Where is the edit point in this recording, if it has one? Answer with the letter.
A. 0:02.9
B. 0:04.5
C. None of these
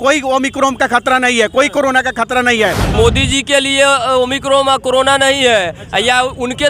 A